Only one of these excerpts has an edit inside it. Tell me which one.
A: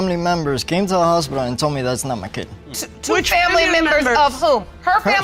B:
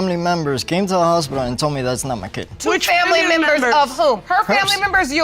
B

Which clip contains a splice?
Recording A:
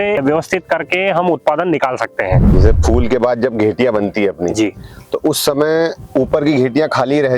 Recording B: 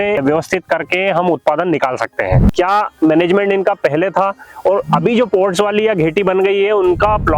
B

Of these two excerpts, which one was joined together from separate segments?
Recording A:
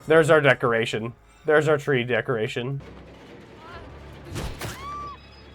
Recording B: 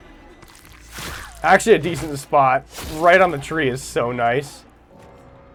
A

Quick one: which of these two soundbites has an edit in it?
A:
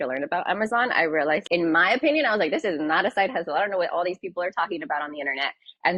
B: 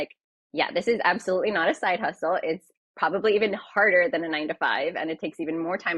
A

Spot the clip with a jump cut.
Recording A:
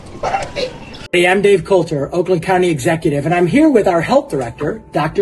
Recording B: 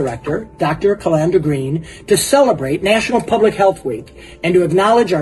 A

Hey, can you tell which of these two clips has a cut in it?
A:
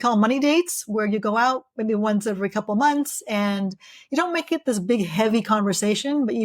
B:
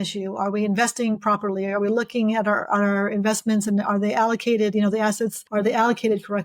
B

